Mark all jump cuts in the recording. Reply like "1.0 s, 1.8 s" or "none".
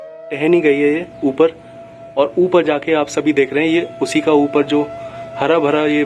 none